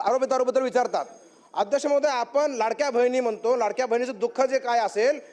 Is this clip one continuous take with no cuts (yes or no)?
yes